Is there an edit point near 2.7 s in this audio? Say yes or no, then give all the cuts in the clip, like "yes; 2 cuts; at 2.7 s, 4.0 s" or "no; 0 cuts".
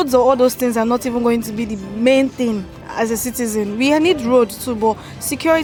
no; 0 cuts